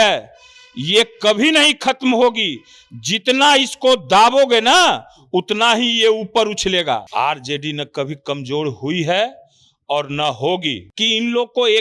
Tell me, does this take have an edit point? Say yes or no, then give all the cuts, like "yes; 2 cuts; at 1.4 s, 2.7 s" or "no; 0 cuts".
yes; 2 cuts; at 7.1 s, 10.9 s